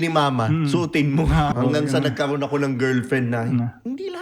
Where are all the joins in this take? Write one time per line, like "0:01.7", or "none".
0:01.5